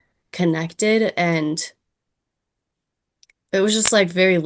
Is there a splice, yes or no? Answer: yes